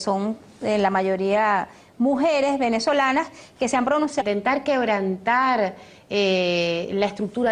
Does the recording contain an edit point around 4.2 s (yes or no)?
no